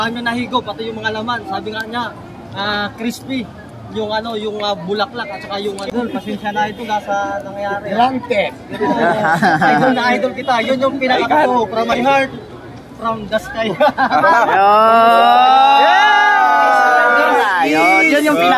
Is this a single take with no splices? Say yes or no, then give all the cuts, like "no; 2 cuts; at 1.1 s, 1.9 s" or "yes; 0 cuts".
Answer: no; 1 cut; at 5.9 s